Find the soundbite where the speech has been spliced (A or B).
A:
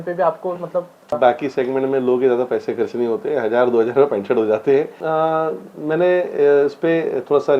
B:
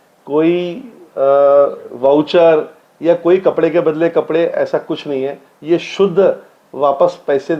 A